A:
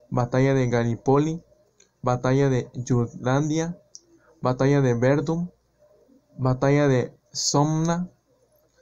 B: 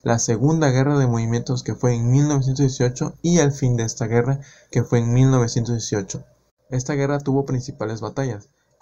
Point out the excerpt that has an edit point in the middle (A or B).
B